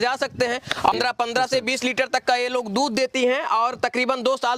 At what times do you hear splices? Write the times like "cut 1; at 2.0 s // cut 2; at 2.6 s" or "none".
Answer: cut 1; at 0.9 s